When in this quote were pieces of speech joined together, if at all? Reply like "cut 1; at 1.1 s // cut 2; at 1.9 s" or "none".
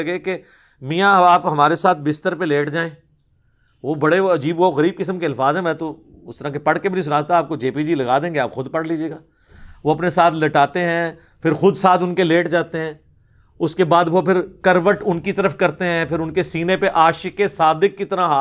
none